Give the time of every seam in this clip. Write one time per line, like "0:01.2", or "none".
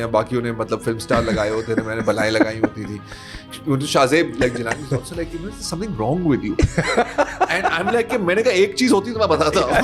0:03.5